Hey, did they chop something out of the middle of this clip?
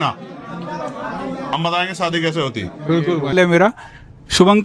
yes; 1 cut; at 3.3 s

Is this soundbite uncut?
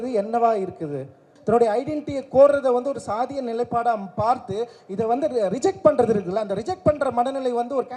no; 1 cut; at 1.3 s

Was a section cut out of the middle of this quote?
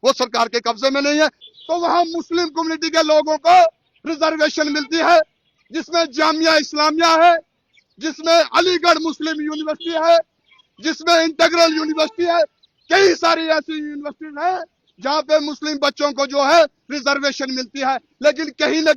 yes; 1 cut; at 1.4 s

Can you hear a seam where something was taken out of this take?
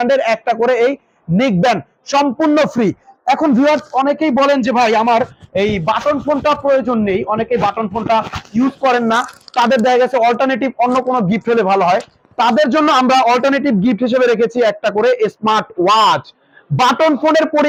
no; 0 cuts

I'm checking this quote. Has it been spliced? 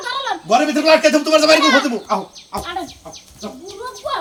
no; 0 cuts

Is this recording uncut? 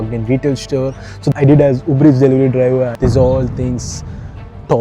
no; 2 cuts; at 1.3 s, 2.9 s

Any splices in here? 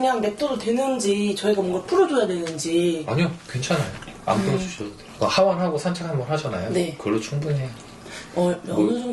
no; 0 cuts

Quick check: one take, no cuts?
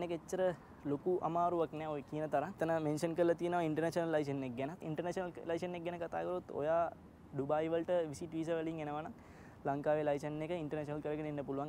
yes; 0 cuts

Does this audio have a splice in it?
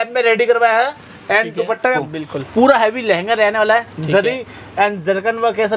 yes; 1 cut; at 2.0 s

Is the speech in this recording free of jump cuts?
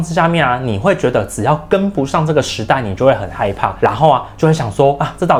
yes; 0 cuts

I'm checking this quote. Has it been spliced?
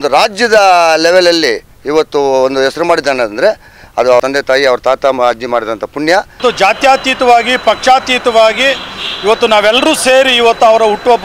yes; 2 cuts; at 4.2 s, 6.4 s

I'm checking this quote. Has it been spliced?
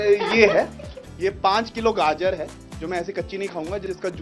no; 0 cuts

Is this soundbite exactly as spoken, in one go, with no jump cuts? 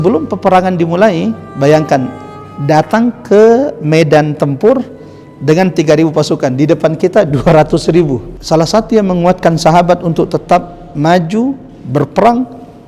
yes; 0 cuts

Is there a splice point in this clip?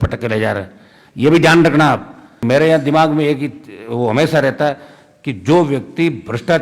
yes; 1 cut; at 2.4 s

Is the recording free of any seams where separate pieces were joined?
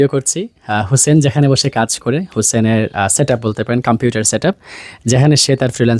yes; 0 cuts

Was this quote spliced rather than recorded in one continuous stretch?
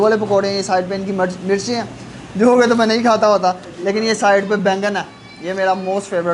no; 0 cuts

